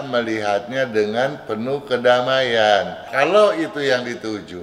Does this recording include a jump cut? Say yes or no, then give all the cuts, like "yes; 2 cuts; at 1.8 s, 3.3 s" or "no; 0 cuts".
yes; 1 cut; at 3.0 s